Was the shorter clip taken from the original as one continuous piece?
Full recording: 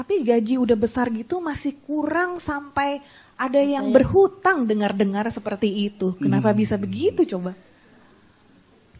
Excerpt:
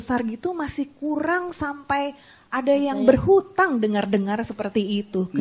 yes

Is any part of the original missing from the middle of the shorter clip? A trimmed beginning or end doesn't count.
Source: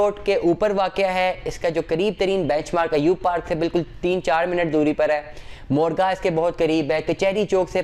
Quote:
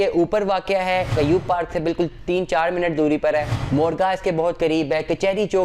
yes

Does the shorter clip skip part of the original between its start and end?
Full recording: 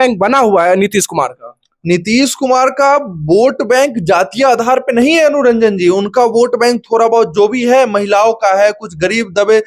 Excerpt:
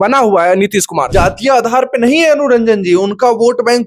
yes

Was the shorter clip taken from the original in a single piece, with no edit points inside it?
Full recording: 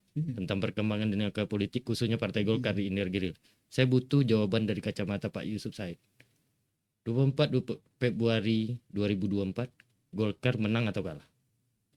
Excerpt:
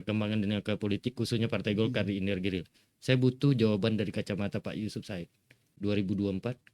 no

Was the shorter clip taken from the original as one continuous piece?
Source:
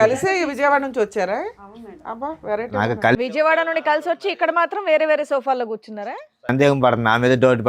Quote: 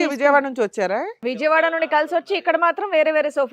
no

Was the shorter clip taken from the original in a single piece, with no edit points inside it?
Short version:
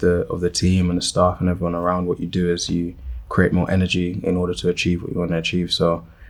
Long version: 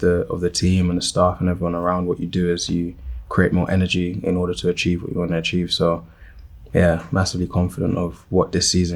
yes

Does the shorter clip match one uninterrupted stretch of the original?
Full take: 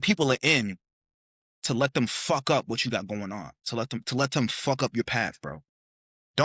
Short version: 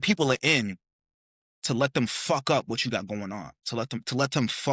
yes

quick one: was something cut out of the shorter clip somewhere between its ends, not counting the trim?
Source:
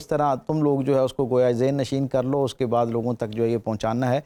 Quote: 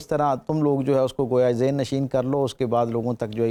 no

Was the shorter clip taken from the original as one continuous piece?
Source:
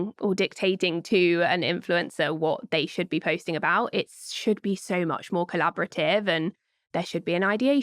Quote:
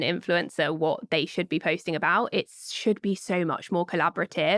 yes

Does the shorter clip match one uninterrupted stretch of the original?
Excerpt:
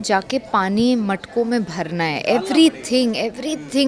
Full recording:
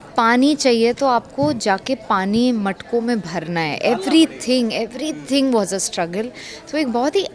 yes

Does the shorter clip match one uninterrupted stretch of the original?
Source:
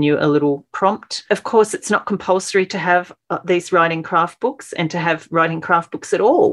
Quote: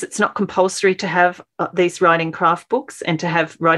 yes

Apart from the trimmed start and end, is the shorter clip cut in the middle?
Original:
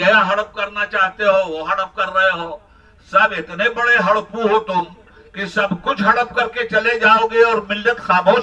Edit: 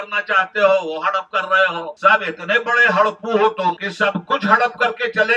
yes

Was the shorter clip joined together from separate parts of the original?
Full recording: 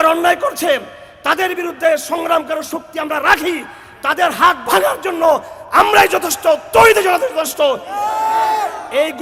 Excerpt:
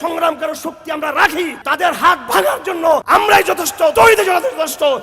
yes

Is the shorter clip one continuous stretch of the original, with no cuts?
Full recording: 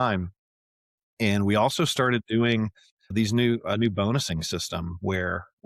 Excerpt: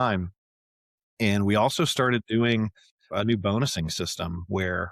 no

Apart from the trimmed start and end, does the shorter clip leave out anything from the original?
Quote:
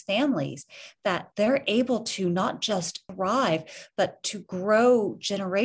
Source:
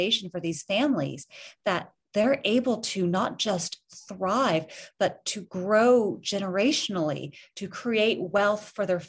yes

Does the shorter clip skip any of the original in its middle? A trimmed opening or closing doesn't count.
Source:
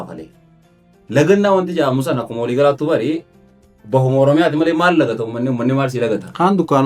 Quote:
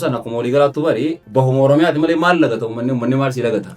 yes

